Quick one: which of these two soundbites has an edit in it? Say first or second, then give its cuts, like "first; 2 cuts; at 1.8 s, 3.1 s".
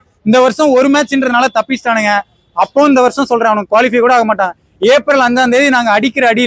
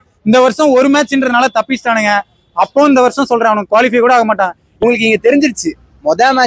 second; 1 cut; at 4.7 s